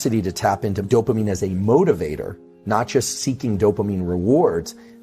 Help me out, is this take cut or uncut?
uncut